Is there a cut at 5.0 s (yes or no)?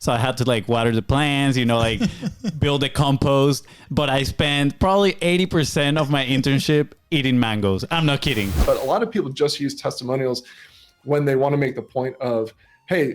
no